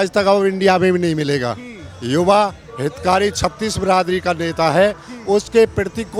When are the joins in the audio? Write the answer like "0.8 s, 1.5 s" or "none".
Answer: none